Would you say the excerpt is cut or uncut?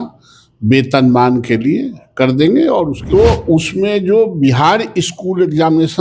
cut